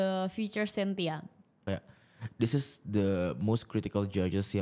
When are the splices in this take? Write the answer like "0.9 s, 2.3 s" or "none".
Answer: 1.6 s